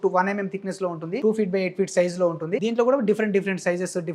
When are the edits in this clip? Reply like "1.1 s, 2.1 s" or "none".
1.2 s, 2.6 s